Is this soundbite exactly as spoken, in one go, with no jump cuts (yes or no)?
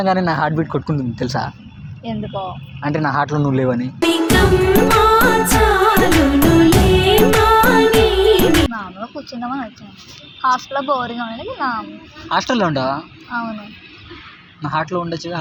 yes